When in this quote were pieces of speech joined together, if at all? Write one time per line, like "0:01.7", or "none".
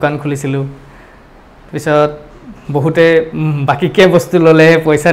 none